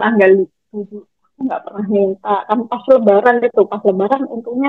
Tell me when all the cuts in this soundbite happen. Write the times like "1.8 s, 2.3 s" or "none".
none